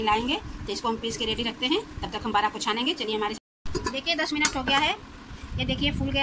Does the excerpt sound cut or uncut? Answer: cut